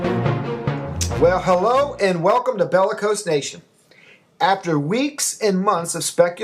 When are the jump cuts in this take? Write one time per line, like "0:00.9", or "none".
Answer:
0:04.2